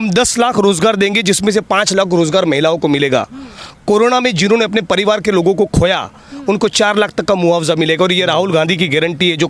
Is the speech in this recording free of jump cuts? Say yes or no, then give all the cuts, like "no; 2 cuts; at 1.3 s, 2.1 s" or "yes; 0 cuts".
yes; 0 cuts